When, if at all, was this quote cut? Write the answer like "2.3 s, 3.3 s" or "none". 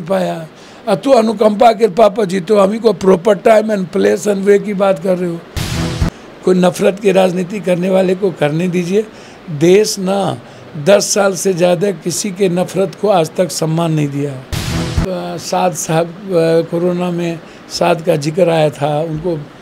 5.7 s, 15.0 s